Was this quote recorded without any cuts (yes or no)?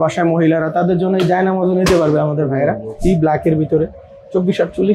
no